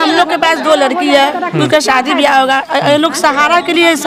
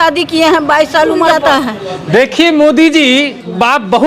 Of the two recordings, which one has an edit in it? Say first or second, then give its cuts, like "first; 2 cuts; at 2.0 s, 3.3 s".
second; 1 cut; at 1.3 s